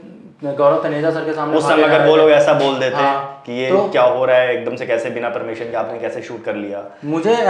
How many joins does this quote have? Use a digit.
0